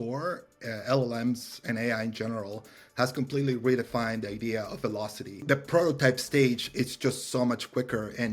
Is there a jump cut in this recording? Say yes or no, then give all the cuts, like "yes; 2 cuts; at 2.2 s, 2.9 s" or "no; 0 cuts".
yes; 1 cut; at 5.4 s